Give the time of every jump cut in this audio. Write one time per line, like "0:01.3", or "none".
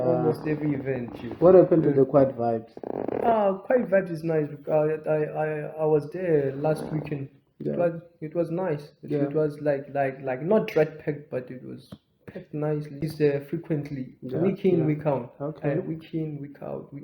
0:13.0